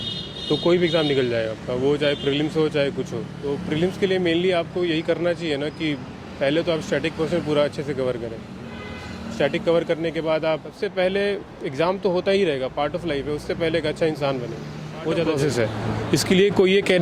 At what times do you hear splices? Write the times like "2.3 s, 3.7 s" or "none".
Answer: 3.4 s, 10.8 s, 15.4 s